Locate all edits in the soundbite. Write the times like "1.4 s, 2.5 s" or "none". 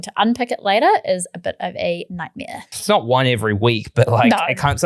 2.7 s